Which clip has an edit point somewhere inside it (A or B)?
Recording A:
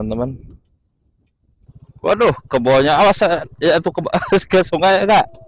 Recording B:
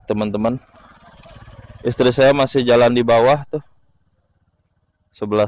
A